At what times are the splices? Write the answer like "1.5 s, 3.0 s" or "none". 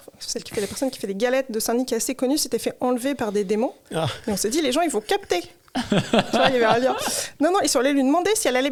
none